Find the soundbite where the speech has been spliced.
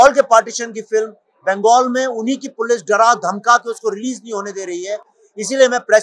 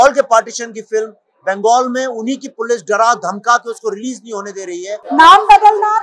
second; 1 cut; at 4.9 s

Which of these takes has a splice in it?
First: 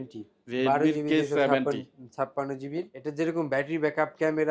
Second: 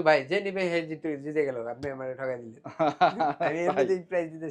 first; 1 cut; at 3.0 s

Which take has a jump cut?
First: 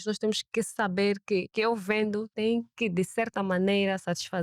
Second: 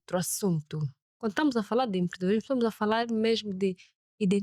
first; 2 cuts; at 1.5 s, 2.3 s

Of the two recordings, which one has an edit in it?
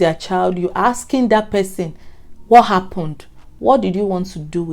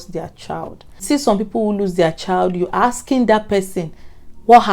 second; 1 cut; at 1.0 s

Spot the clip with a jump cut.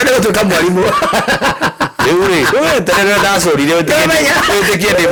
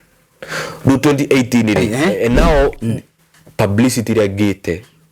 second; 1 cut; at 1.8 s

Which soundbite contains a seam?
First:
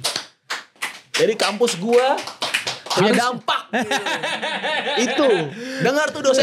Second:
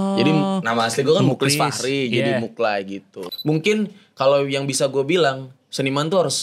second; 1 cut; at 3.1 s

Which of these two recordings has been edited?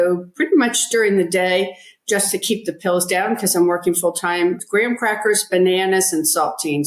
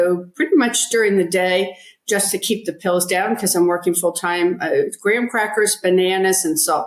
first; 1 cut; at 4.6 s

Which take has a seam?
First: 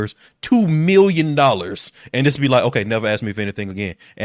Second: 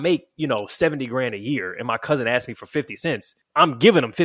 second; 1 cut; at 3.4 s

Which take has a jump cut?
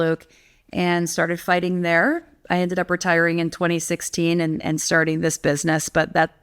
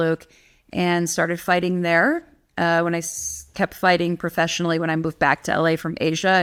first; 1 cut; at 2.3 s

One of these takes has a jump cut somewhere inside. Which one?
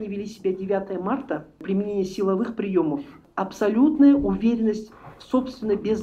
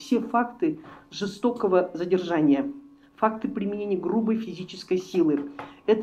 first; 2 cuts; at 1.6 s, 3.2 s

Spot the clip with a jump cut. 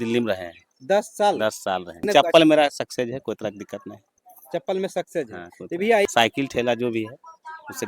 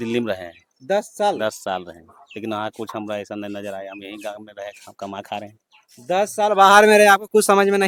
first; 2 cuts; at 2.1 s, 6.1 s

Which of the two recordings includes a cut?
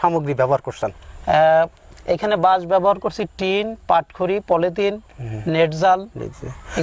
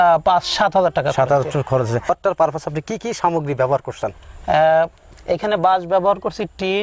second; 1 cut; at 2.1 s

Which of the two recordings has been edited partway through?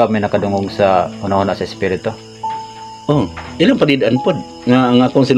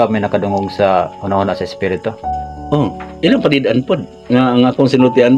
second; 1 cut; at 2.3 s

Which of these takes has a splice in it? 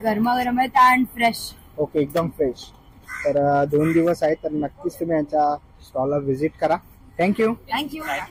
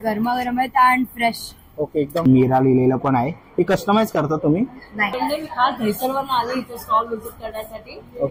second; 2 cuts; at 2.2 s, 5.1 s

